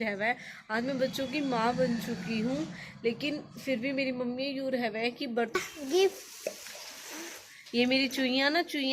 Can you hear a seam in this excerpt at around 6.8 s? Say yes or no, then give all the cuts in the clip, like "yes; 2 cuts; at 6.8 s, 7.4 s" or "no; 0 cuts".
no; 1 cut; at 5.6 s